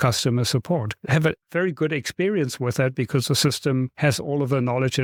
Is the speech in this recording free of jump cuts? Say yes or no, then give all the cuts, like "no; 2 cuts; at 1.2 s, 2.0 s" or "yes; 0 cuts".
yes; 0 cuts